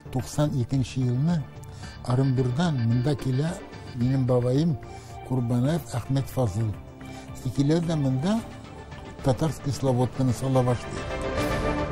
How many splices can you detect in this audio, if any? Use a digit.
1